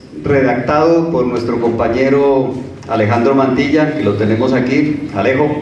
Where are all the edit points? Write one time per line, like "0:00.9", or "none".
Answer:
none